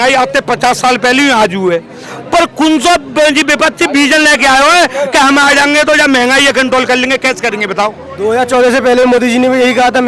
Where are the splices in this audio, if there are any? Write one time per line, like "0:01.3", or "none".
none

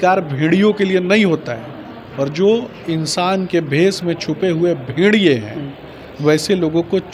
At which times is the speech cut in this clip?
none

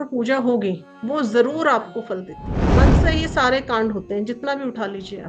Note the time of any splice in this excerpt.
0:02.8

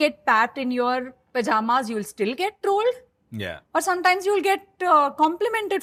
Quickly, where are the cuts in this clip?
none

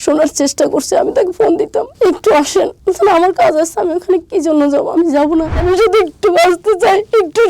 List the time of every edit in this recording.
0:05.6

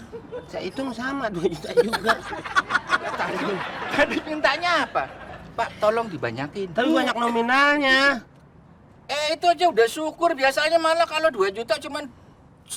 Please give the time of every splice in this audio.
none

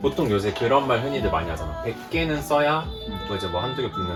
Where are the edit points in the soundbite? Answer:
none

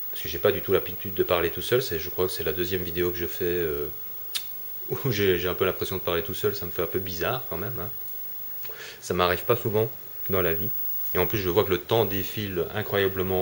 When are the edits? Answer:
0:08.7

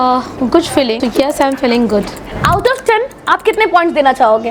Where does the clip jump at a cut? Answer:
0:00.9
0:02.3

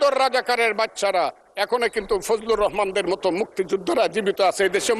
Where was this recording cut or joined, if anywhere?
none

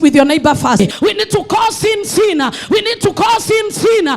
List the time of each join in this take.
0:01.0

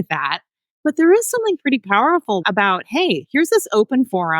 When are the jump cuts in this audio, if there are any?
0:02.4

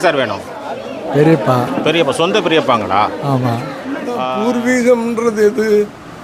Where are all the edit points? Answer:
0:04.2

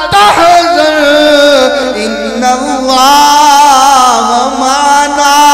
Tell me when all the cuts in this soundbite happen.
none

